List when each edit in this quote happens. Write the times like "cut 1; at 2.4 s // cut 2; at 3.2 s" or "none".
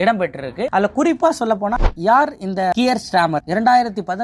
cut 1; at 1.8 s